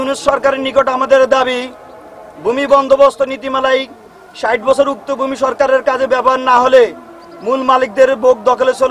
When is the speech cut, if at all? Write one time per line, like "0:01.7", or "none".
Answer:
none